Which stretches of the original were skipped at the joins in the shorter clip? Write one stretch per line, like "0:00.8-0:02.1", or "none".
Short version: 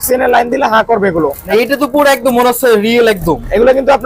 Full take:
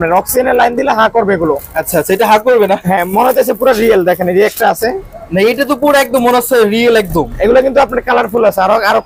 0:01.7-0:05.3